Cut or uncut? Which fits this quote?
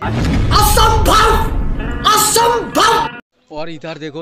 cut